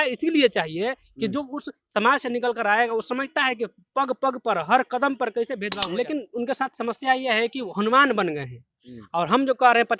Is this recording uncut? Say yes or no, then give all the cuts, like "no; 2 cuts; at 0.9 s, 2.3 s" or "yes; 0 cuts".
no; 1 cut; at 5.7 s